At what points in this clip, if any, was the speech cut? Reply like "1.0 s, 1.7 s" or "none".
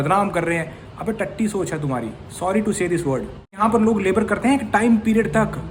3.6 s